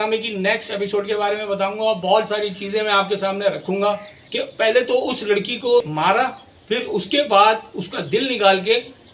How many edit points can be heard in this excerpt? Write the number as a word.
two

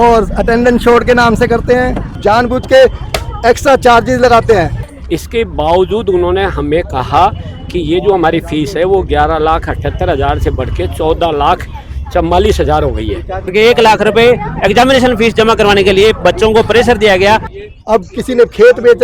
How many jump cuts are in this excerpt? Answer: four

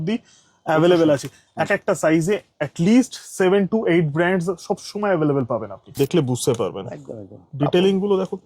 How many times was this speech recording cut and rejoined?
one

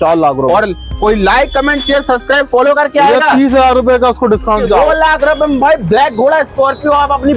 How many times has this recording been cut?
one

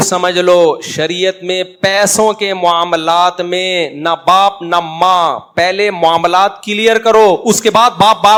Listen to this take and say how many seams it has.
zero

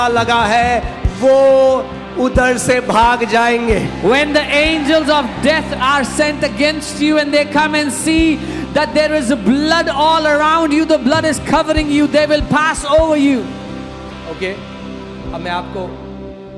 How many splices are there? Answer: zero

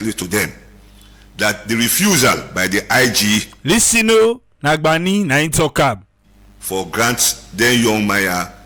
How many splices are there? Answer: zero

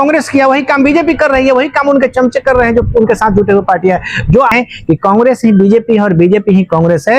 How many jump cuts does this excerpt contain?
one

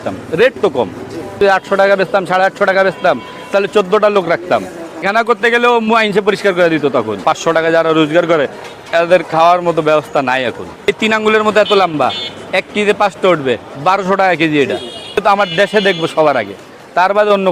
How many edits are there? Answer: five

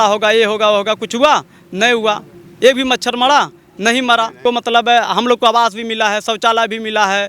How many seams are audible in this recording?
one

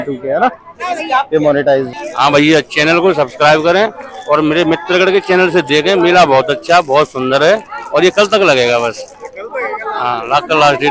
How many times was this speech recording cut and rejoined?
one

